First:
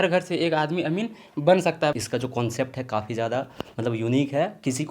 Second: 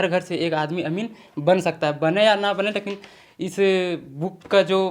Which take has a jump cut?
first; 1 cut; at 2.0 s

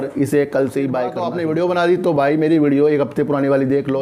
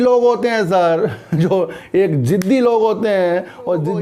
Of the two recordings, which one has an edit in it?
first; 1 cut; at 1.2 s

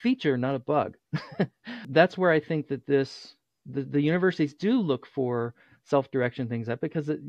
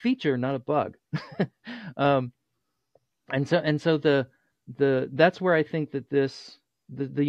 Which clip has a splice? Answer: first; 1 cut; at 1.9 s

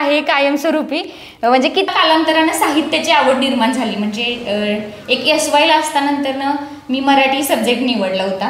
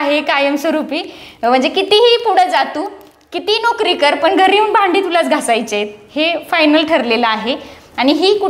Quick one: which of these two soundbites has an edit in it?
first; 1 cut; at 1.9 s

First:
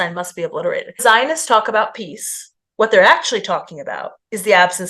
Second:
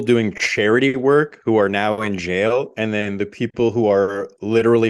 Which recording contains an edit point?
first; 1 cut; at 1.0 s

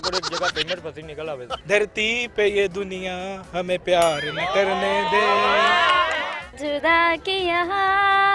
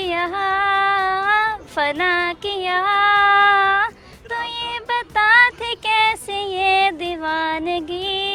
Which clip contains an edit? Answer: first; 2 cuts; at 1.5 s, 6.3 s

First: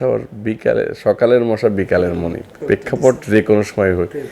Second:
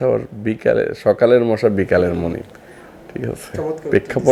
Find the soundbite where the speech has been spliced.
first; 1 cut; at 2.5 s

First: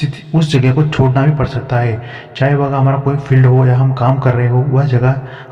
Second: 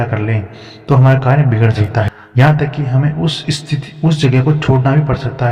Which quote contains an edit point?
second; 1 cut; at 2.2 s

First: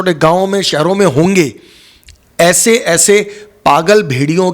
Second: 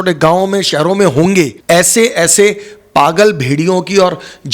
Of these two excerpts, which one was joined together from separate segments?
second; 1 cut; at 1.6 s

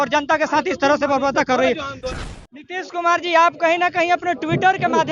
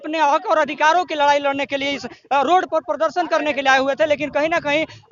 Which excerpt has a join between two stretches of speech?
first; 1 cut; at 2.0 s

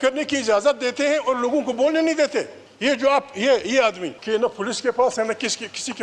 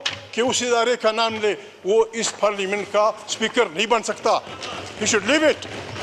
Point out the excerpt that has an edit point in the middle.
first; 2 cuts; at 2.6 s, 4.1 s

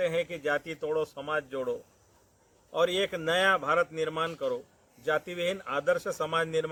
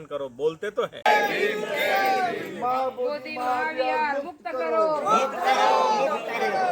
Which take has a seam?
second; 1 cut; at 1.0 s

